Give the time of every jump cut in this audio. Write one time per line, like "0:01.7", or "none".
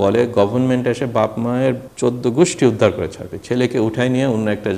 0:01.9